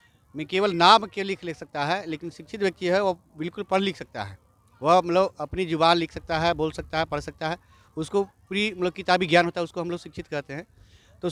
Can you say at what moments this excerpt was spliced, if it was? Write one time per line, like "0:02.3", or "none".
none